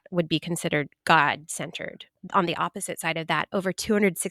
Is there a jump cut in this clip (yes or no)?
yes